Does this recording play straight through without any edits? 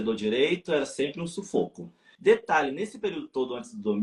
yes; 0 cuts

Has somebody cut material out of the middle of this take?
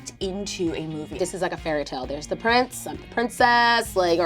yes; 1 cut; at 1.1 s

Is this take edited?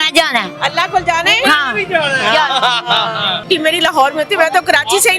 yes; 1 cut; at 3.5 s

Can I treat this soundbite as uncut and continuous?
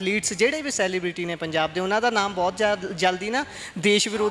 yes; 0 cuts

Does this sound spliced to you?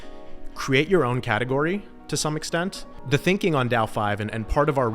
yes; 1 cut; at 2.9 s

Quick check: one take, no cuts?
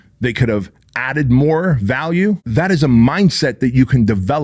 no; 1 cut; at 2.5 s

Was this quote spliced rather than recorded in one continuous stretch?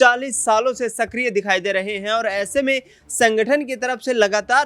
no; 0 cuts

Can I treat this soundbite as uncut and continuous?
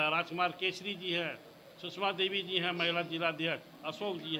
yes; 0 cuts

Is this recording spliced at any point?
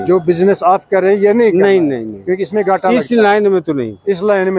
no; 0 cuts

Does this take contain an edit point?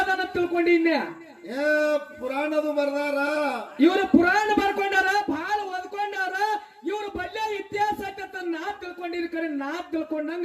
no; 0 cuts

